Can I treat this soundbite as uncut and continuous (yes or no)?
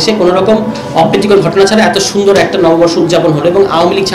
yes